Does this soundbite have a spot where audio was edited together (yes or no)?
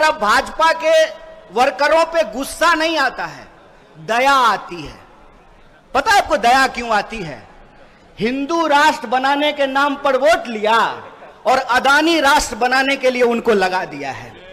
no